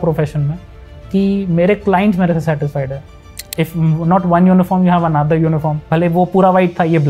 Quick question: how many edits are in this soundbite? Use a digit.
2